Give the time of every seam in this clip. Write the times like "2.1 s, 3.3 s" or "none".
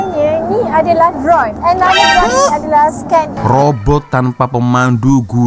3.3 s